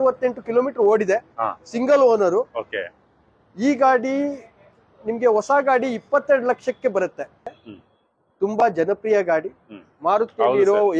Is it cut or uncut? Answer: cut